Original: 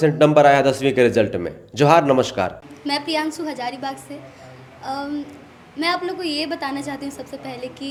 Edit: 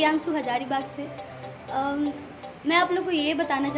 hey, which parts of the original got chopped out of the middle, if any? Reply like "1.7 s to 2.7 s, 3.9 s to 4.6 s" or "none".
none